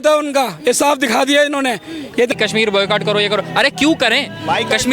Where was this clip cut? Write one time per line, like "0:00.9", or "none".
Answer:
0:02.3

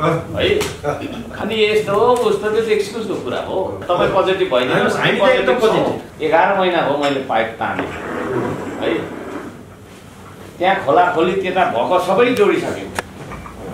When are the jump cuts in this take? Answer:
0:01.3
0:03.8
0:06.1

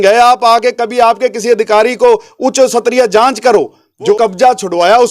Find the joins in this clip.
0:04.1

